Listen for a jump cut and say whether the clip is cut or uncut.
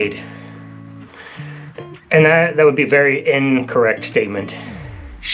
uncut